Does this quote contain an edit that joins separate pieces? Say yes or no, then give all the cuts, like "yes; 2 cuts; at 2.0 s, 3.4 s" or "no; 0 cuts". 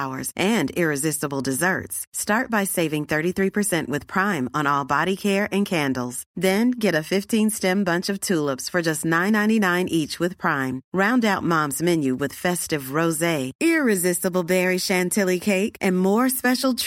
no; 0 cuts